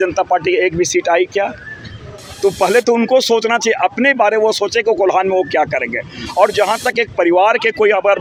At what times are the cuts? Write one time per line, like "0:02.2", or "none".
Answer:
none